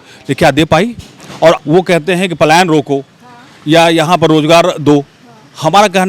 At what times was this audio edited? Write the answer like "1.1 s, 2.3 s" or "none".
1.6 s